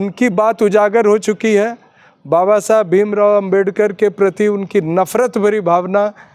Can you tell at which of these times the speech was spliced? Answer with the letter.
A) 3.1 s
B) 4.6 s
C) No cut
C